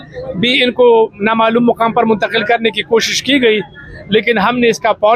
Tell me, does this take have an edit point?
no; 0 cuts

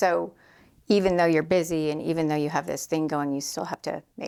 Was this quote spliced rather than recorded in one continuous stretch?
no; 0 cuts

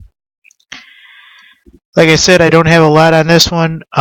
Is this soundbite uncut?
yes; 0 cuts

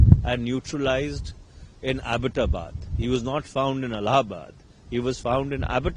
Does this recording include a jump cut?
no; 0 cuts

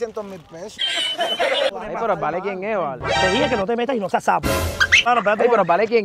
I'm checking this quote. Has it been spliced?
yes; 2 cuts; at 1.7 s, 4.9 s

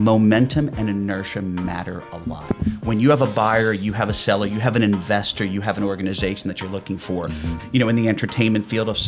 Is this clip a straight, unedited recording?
no; 1 cut; at 7.6 s

